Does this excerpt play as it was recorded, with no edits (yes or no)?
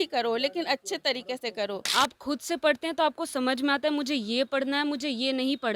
no